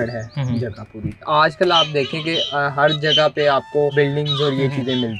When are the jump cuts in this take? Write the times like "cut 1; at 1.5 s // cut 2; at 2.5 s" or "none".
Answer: cut 1; at 1.3 s // cut 2; at 3.9 s